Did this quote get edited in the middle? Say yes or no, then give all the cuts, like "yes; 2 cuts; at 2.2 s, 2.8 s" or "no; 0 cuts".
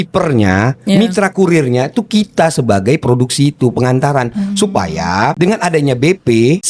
no; 0 cuts